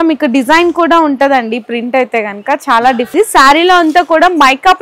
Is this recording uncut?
no; 1 cut; at 3.1 s

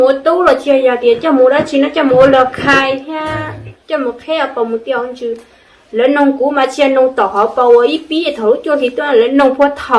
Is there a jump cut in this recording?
no; 0 cuts

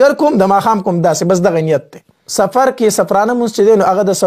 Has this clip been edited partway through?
yes; 1 cut; at 2.2 s

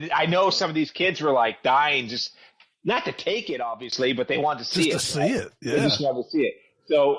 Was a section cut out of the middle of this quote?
no; 0 cuts

